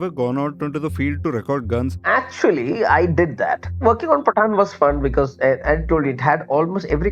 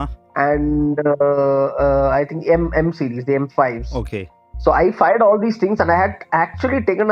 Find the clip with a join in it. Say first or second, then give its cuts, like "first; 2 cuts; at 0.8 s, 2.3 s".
first; 2 cuts; at 1.9 s, 3.8 s